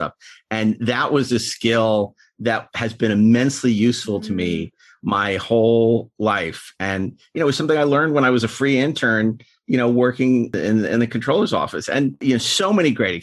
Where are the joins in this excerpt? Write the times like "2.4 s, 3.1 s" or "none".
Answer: 10.6 s, 12.2 s